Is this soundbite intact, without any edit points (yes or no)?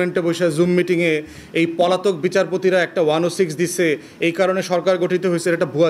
yes